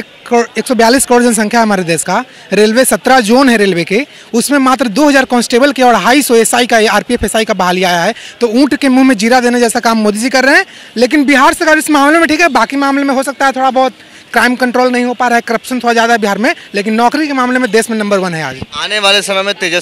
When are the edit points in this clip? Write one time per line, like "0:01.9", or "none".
none